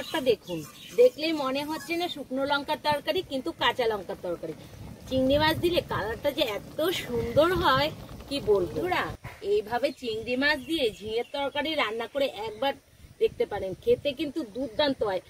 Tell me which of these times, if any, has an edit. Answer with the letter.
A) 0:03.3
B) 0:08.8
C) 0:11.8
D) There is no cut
B